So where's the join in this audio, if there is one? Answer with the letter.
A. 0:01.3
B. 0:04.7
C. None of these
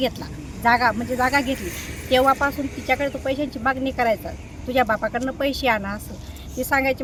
C